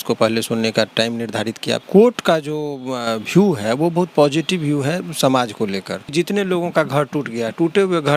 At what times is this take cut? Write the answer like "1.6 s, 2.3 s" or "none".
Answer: 1.8 s, 6.1 s